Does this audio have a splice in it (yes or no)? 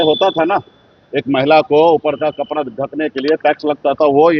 no